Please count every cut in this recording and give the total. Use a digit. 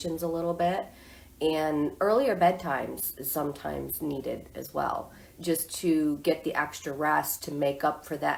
0